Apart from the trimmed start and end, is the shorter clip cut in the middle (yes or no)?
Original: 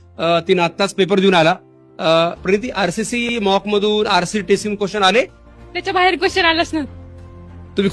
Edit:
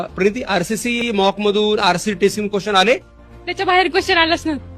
no